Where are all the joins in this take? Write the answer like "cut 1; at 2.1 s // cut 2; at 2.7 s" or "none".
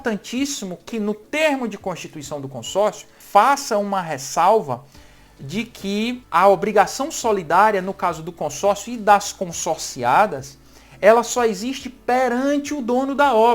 cut 1; at 3.1 s // cut 2; at 6.2 s

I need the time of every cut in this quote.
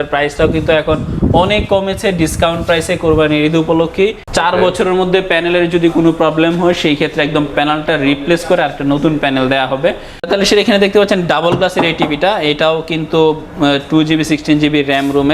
cut 1; at 4.2 s // cut 2; at 10.1 s

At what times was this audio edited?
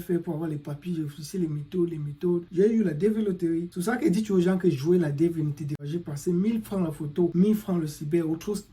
cut 1; at 2.5 s // cut 2; at 3.7 s // cut 3; at 5.8 s // cut 4; at 7.3 s

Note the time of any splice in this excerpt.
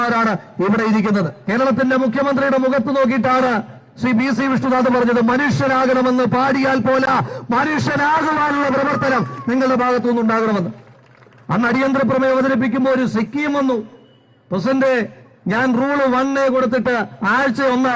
cut 1; at 1.4 s

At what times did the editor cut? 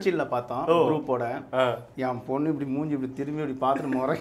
cut 1; at 1.9 s

